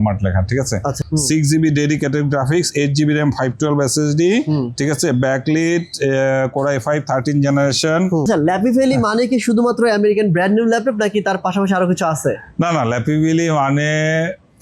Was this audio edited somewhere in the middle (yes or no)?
yes